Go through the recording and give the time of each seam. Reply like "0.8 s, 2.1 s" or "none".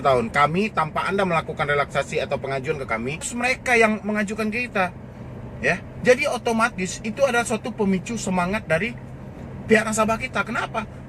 3.3 s